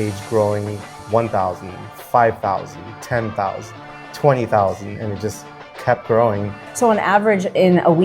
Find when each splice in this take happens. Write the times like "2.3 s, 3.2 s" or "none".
0.9 s, 6.6 s